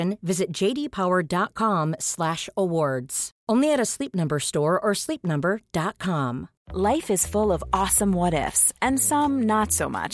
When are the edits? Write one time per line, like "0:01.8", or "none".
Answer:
0:06.6